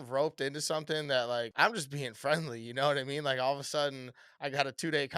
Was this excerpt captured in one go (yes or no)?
no